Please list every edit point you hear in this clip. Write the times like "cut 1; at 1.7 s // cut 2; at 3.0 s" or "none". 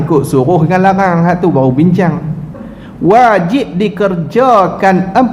cut 1; at 2.6 s